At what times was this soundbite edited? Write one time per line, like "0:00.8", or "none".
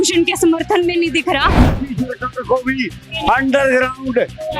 0:01.7